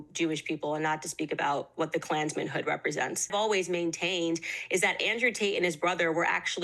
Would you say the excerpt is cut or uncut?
cut